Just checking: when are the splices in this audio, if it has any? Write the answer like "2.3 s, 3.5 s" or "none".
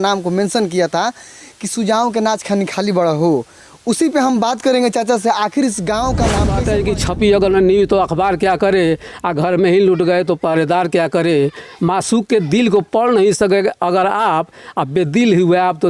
6.5 s